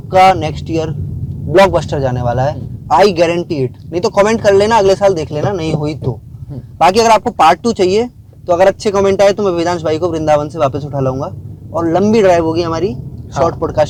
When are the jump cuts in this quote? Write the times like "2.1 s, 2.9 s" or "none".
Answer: none

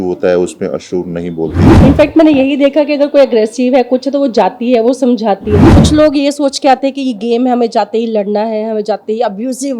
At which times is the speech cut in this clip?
1.6 s, 5.7 s

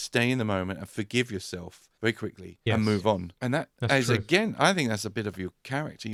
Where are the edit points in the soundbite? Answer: none

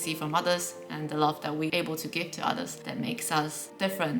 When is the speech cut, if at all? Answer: 1.7 s, 2.8 s

